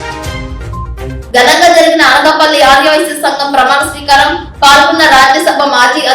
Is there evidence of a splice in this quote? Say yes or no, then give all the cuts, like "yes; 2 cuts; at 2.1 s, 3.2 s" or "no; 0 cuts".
yes; 1 cut; at 1.1 s